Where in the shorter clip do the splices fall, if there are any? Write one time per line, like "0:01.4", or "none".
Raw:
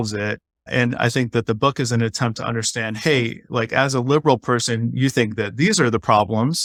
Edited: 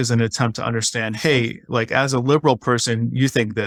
none